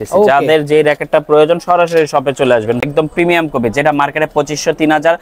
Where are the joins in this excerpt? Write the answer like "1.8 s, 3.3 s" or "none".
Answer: 2.8 s